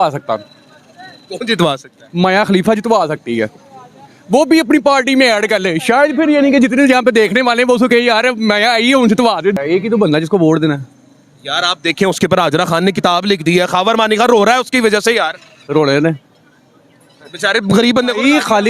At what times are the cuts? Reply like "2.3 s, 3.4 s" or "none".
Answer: 9.5 s